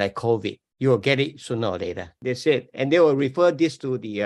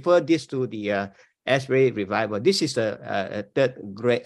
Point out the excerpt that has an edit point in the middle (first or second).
first